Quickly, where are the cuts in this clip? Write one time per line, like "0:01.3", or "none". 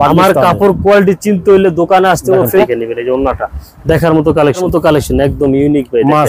0:02.6
0:04.6